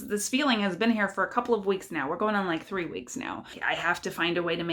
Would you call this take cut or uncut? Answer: cut